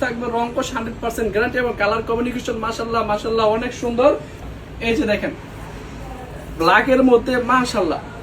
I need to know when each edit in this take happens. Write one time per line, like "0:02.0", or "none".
0:04.4